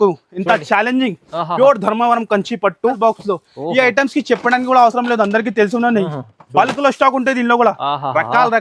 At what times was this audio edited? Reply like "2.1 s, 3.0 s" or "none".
3.0 s